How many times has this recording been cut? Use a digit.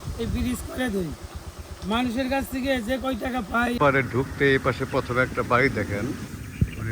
1